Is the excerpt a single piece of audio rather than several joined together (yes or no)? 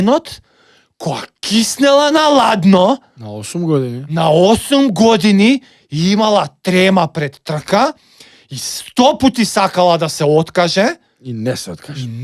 yes